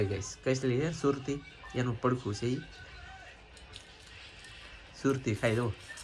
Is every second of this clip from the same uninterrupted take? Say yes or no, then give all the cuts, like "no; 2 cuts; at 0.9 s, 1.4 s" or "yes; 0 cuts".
yes; 0 cuts